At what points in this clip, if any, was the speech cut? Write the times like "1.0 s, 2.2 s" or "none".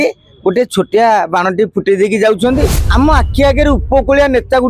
2.8 s